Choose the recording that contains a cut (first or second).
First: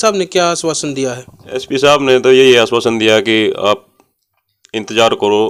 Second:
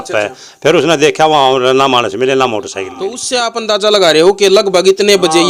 second